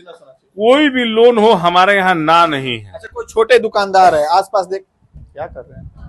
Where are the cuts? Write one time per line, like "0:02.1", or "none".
none